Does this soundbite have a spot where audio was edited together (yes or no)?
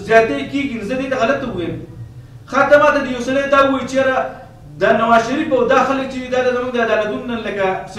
no